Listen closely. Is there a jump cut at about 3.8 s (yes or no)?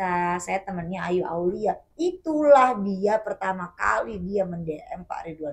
no